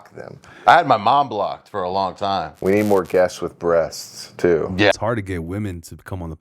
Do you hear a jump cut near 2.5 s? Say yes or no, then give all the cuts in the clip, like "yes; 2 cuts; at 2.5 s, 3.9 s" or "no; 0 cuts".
yes; 2 cuts; at 2.5 s, 5.0 s